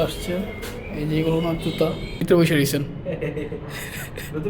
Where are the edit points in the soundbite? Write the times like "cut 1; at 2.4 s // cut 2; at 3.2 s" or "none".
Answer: cut 1; at 2.2 s